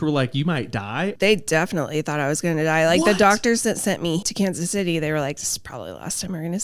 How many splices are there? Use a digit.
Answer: 2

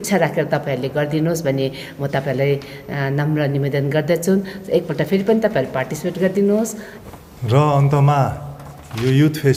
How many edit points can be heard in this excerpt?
0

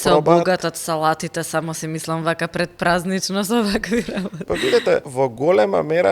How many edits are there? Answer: 2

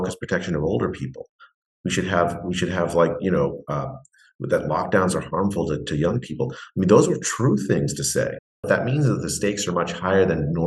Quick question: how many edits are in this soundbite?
1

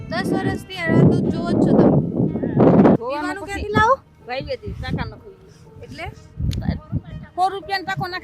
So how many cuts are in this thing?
1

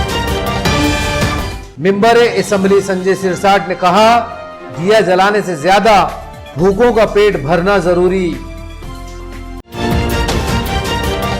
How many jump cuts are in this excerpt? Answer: 1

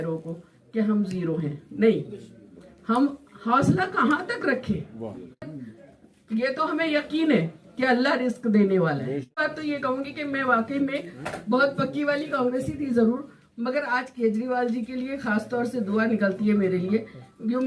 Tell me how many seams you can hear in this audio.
2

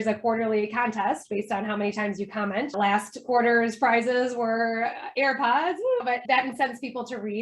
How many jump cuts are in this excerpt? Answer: 1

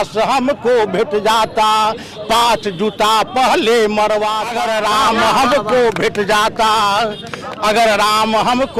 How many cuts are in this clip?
1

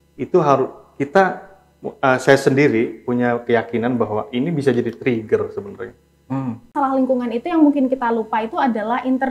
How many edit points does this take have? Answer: 1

